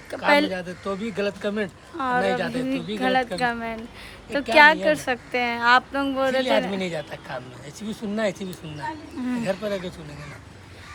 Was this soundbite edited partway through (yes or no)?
no